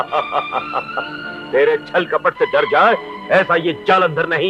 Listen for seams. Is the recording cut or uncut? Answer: uncut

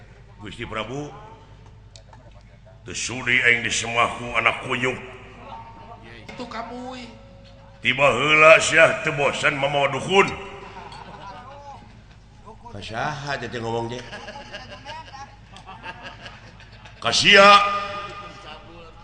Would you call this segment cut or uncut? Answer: cut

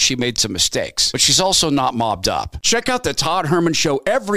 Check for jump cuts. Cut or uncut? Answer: cut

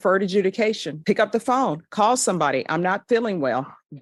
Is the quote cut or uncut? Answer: uncut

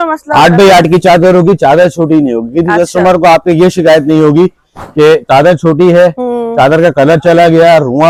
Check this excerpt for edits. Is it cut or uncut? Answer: uncut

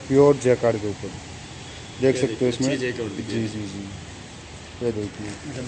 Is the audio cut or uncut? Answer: uncut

